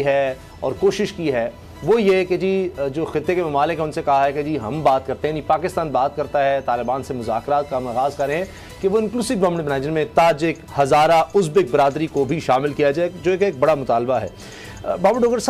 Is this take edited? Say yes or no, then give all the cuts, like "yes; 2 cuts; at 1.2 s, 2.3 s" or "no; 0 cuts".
no; 0 cuts